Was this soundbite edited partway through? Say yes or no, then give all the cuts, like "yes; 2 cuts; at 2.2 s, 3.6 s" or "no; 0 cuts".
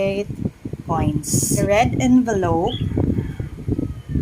yes; 1 cut; at 1.7 s